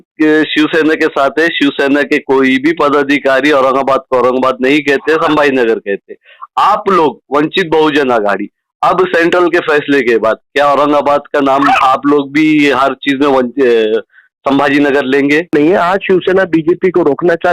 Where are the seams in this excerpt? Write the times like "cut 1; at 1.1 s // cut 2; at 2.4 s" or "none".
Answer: cut 1; at 15.5 s